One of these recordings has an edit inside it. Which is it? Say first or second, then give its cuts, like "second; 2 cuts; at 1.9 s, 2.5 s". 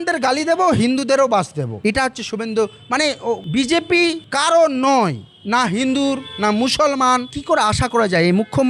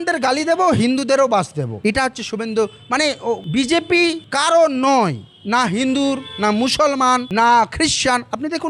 first; 1 cut; at 7.3 s